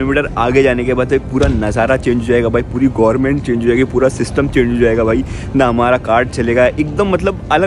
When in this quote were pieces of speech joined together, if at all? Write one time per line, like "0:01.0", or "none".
none